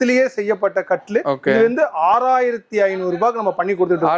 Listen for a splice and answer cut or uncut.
uncut